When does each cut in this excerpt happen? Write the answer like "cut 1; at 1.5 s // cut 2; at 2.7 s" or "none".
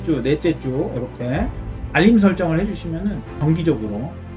cut 1; at 3.4 s